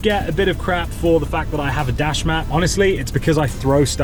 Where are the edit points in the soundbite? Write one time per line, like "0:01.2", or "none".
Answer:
none